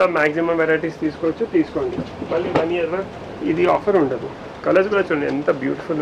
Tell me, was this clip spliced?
no; 0 cuts

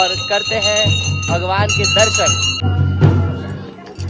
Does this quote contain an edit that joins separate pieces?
no; 0 cuts

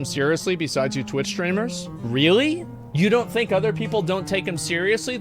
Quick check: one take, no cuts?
no; 2 cuts; at 1.9 s, 2.8 s

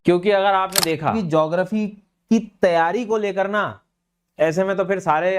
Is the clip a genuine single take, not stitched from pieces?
no; 1 cut; at 1.2 s

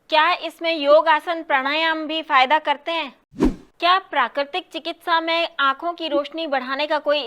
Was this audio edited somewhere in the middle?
yes; 1 cut; at 3.4 s

